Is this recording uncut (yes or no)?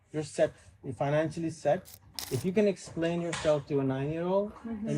no